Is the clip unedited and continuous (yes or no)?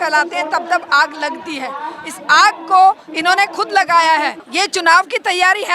no